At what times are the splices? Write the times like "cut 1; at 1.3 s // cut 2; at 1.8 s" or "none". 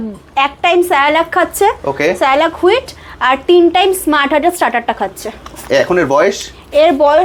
none